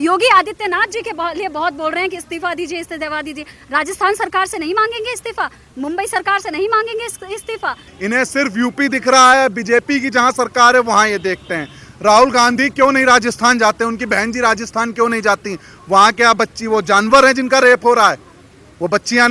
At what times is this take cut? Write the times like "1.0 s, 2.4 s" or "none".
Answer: 7.9 s